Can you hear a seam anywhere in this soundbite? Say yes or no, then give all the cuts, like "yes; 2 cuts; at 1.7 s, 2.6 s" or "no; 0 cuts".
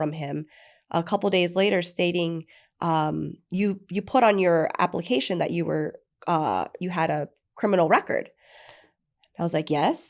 no; 0 cuts